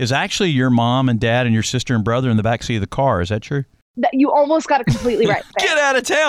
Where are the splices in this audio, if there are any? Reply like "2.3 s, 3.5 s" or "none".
3.8 s, 5.5 s